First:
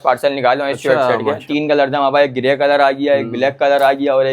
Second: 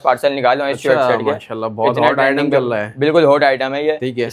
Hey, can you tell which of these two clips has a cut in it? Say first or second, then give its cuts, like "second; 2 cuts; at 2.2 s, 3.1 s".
first; 1 cut; at 1.4 s